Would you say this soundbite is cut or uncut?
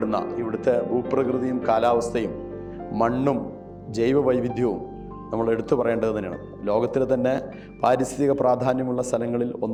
uncut